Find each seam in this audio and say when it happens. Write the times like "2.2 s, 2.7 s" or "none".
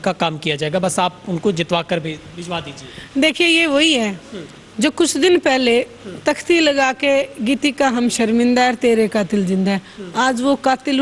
none